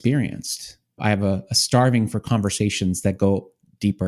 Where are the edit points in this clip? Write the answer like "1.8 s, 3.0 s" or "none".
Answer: 1.0 s